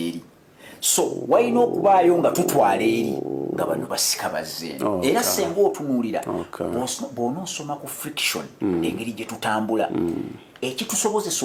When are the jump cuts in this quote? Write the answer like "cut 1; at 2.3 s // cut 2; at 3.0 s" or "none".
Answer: none